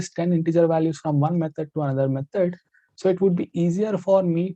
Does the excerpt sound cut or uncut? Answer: uncut